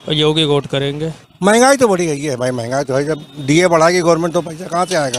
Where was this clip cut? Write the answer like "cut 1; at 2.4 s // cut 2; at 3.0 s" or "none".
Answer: cut 1; at 1.2 s